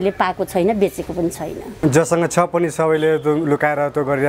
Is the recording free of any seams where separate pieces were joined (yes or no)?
no